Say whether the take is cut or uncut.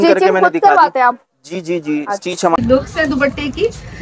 cut